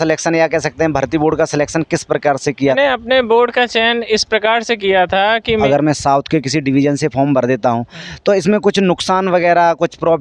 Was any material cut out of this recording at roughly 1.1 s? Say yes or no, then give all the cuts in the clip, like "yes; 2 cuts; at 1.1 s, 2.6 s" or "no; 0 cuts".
no; 2 cuts; at 2.8 s, 5.6 s